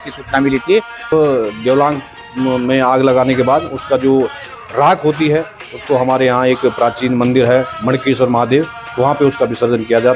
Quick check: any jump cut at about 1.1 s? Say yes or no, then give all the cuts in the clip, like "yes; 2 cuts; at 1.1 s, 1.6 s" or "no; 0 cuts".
yes; 1 cut; at 1.1 s